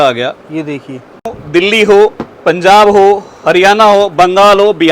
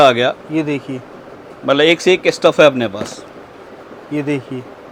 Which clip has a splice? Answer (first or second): first